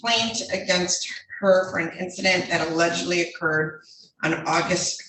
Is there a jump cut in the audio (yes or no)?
no